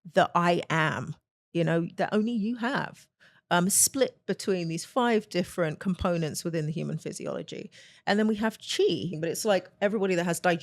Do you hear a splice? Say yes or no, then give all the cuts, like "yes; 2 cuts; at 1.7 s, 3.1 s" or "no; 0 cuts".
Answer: yes; 1 cut; at 9.1 s